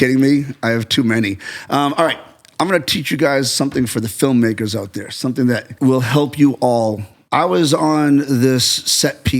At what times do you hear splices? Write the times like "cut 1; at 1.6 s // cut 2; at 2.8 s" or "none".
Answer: cut 1; at 5.7 s // cut 2; at 7.1 s